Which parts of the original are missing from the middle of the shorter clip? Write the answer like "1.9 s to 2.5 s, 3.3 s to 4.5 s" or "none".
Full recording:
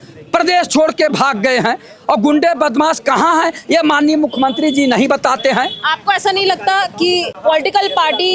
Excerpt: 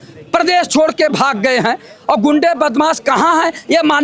none